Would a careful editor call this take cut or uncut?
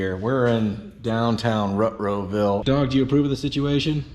cut